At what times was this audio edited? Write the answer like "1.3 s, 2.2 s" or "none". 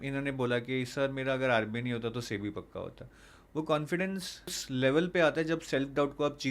4.6 s